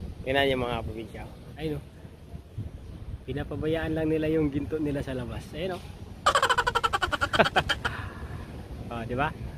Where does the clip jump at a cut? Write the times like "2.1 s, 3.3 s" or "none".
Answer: 1.5 s

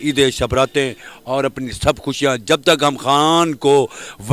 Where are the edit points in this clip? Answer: none

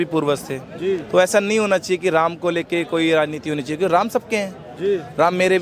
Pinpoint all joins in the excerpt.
none

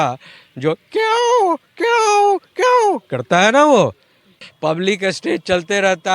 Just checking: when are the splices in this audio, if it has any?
4.5 s

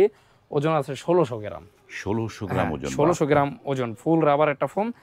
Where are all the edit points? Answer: none

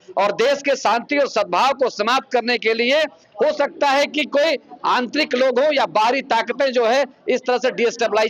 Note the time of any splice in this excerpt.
none

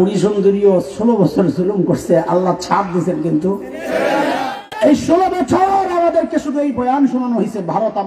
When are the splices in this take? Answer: 4.6 s

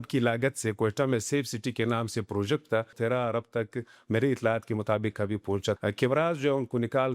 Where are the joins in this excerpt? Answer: 2.9 s, 5.8 s

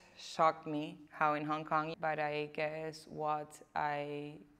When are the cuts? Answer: 1.9 s

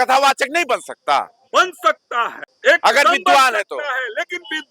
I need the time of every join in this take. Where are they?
2.4 s

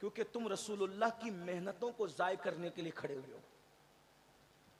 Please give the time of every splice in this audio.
none

